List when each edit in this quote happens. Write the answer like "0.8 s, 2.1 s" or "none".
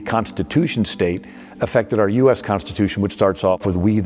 none